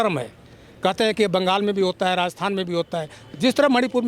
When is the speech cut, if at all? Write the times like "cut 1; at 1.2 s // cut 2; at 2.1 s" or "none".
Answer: none

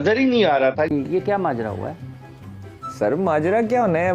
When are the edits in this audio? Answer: cut 1; at 0.9 s

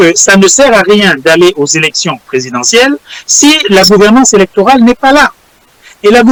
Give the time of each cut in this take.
none

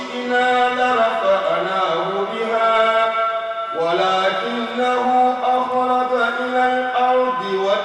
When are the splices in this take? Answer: none

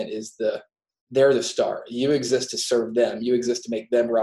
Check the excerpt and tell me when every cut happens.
none

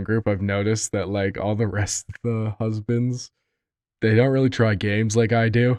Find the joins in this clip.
none

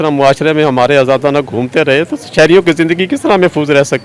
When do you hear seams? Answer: none

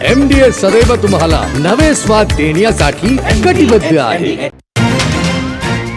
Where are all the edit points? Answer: cut 1; at 4.6 s

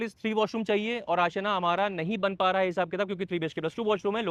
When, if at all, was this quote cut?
none

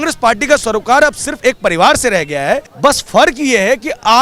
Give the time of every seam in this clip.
cut 1; at 2.7 s

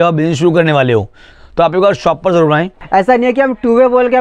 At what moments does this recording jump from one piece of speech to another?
cut 1; at 2.7 s

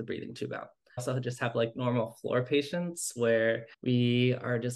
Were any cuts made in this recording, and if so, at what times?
cut 1; at 1.0 s // cut 2; at 3.7 s

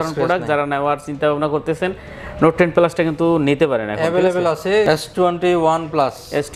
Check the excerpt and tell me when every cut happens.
cut 1; at 4.9 s

